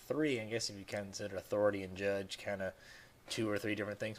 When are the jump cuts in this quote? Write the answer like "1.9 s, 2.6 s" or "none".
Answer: 1.4 s